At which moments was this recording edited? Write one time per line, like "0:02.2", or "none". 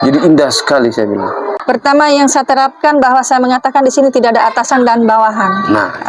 0:01.4